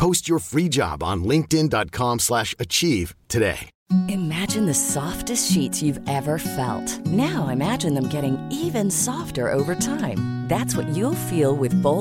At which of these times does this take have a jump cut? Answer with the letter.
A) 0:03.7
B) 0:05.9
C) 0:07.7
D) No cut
A